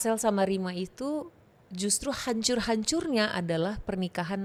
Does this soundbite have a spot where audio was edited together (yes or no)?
no